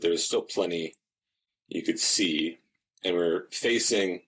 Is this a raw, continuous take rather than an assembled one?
yes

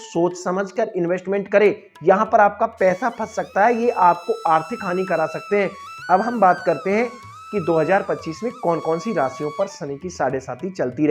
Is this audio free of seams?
yes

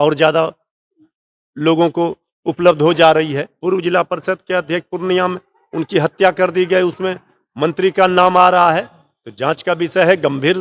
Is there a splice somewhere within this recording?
yes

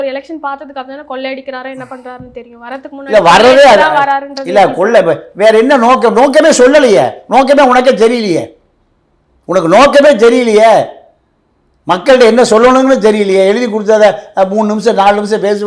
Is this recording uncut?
yes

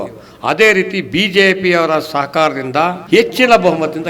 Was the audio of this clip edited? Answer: yes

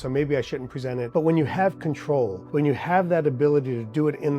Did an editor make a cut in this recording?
yes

